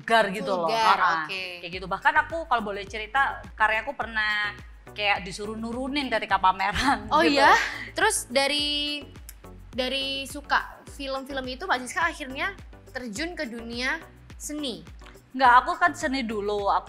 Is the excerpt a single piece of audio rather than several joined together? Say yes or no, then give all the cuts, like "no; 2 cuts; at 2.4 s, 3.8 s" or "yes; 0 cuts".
no; 2 cuts; at 3.4 s, 7.8 s